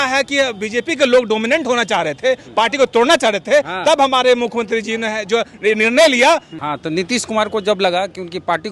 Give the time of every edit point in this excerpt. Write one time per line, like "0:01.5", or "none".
0:06.5